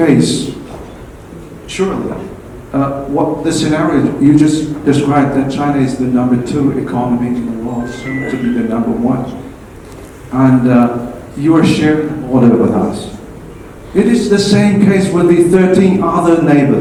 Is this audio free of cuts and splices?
yes; 0 cuts

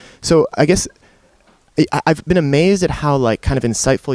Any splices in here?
yes; 1 cut; at 2.3 s

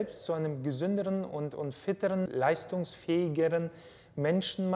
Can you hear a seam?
yes; 1 cut; at 2.3 s

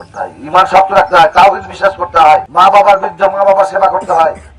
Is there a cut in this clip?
yes; 1 cut; at 2.5 s

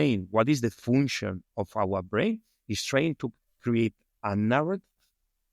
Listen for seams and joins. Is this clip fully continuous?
yes; 0 cuts

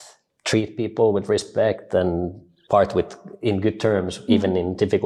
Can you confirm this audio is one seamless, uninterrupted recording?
yes; 0 cuts

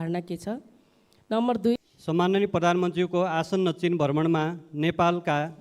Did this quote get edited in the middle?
yes; 1 cut; at 1.8 s

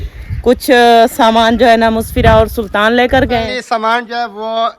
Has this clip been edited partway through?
yes; 1 cut; at 3.6 s

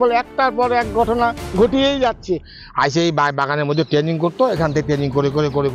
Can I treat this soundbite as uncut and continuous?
no; 1 cut; at 2.6 s

